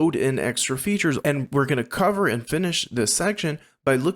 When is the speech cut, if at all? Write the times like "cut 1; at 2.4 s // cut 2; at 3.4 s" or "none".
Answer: cut 1; at 1.3 s

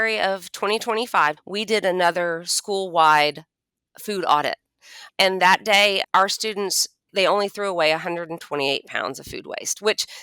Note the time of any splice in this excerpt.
cut 1; at 1.4 s // cut 2; at 5.0 s // cut 3; at 6.0 s // cut 4; at 7.1 s

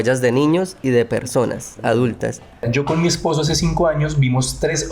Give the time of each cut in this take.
cut 1; at 2.7 s

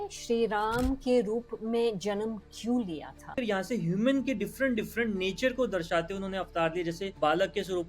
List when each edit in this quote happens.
cut 1; at 3.3 s

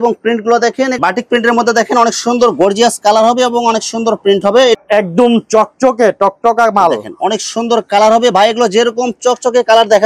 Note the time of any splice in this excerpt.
cut 1; at 0.9 s // cut 2; at 4.8 s

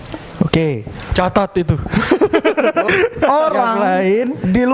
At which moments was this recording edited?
cut 1; at 2.9 s

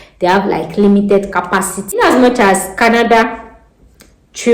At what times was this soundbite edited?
cut 1; at 2.0 s

